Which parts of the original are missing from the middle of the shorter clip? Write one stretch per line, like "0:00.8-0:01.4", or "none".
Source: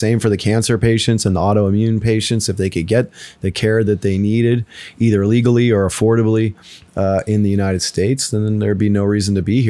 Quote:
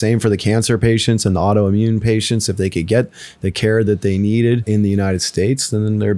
0:04.7-0:07.3